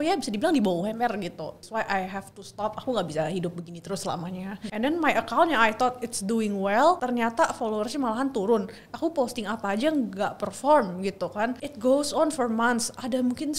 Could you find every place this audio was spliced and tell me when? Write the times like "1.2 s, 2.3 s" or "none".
1.6 s, 4.6 s